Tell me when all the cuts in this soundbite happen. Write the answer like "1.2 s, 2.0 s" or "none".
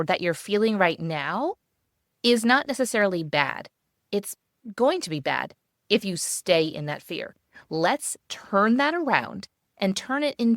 9.6 s